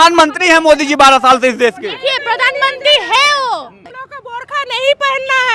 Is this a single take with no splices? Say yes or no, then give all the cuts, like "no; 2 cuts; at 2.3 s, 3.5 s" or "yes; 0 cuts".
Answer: no; 1 cut; at 3.8 s